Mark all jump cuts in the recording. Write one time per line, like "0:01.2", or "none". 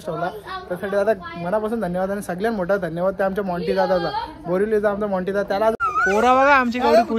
0:05.8